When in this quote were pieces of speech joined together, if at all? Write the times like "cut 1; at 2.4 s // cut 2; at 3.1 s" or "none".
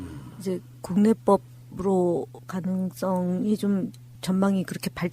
cut 1; at 3.7 s